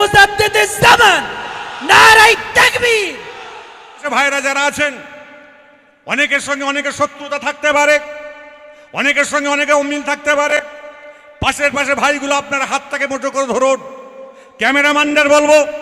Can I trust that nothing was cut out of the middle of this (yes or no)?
no